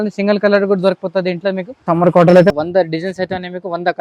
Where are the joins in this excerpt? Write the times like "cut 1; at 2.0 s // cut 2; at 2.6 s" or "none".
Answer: cut 1; at 1.8 s // cut 2; at 2.5 s

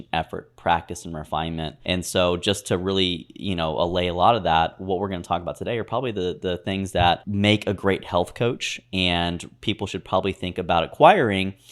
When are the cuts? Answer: cut 1; at 1.7 s // cut 2; at 7.3 s

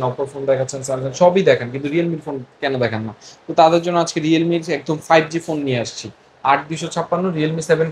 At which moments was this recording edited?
none

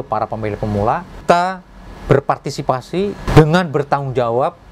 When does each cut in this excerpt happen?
cut 1; at 1.2 s // cut 2; at 3.3 s

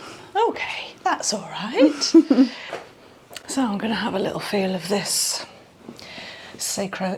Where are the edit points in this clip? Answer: none

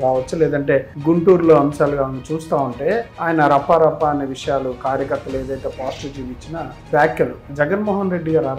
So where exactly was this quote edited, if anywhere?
cut 1; at 0.9 s // cut 2; at 3.1 s // cut 3; at 6.8 s // cut 4; at 7.4 s

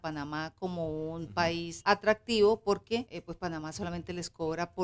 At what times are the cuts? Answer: cut 1; at 1.7 s // cut 2; at 3.2 s

